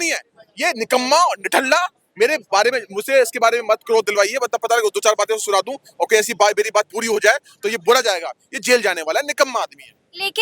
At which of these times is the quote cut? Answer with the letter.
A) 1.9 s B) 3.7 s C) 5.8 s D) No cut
D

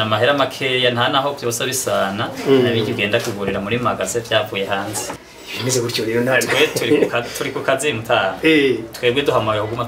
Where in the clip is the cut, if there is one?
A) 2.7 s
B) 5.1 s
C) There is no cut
B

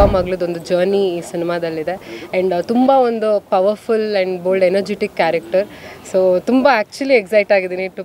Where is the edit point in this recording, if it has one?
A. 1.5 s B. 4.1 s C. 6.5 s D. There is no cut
D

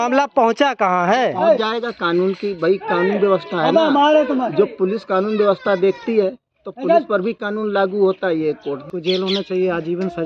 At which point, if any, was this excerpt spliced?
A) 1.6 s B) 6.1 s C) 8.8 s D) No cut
C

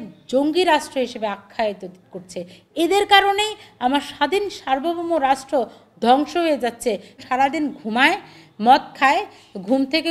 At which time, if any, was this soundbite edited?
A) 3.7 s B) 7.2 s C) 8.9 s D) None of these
B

